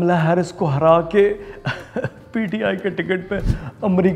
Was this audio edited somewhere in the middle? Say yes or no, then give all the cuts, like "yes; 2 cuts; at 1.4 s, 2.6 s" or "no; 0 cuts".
no; 0 cuts